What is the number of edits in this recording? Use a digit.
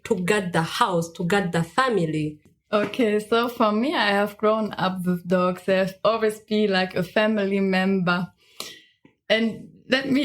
1